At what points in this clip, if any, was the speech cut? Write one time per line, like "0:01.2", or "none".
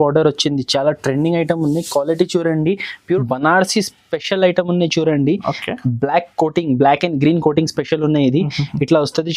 0:03.1